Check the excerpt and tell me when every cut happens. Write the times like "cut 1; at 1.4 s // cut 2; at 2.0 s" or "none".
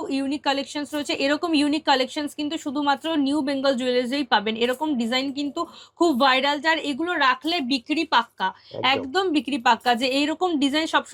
none